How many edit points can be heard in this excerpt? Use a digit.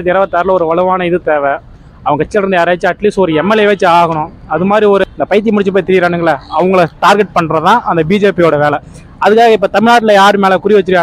1